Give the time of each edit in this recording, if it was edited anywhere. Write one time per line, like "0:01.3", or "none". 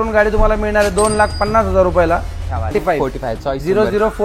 0:02.7